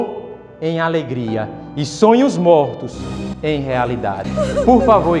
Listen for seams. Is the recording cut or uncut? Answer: uncut